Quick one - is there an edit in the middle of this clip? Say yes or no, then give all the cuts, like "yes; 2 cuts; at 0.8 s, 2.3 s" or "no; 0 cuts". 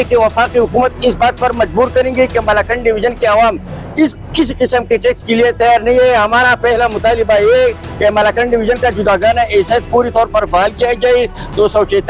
no; 0 cuts